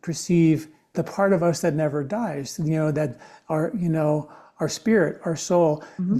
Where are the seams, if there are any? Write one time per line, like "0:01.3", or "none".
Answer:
0:00.9

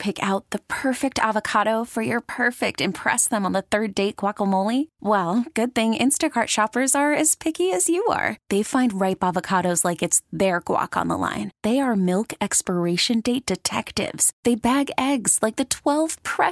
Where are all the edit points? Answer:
none

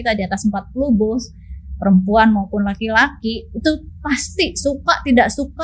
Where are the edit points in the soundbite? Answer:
none

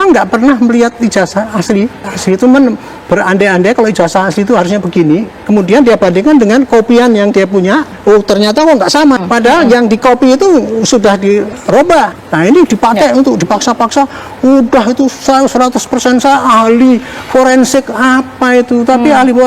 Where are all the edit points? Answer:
0:02.1
0:07.9
0:09.2
0:11.8

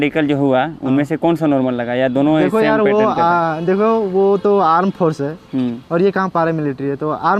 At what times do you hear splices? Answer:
none

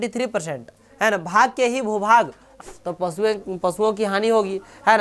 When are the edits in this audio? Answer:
0:02.6

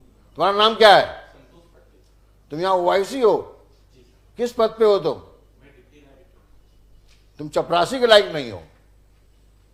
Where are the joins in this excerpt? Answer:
none

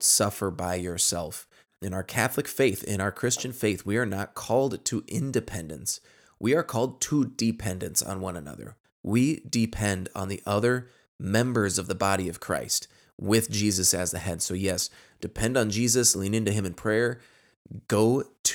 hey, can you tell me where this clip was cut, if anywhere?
0:01.7

